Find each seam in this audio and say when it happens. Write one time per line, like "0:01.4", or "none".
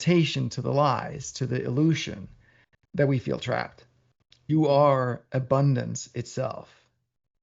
0:04.5